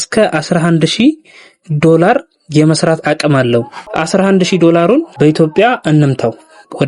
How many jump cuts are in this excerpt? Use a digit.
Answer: 2